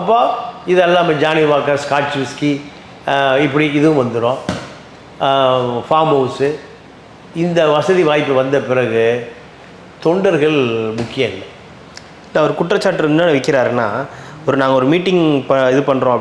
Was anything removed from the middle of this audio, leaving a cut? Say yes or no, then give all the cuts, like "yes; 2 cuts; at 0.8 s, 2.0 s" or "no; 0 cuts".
no; 0 cuts